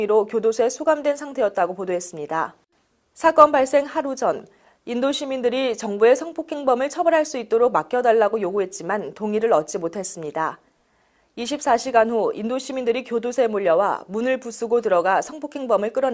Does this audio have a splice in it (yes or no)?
yes